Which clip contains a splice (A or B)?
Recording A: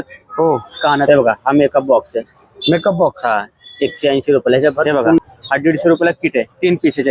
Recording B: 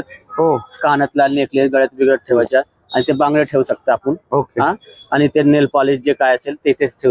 A